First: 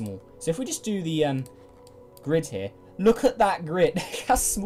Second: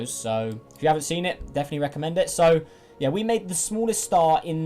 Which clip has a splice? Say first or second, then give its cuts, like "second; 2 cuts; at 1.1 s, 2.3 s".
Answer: second; 1 cut; at 1.1 s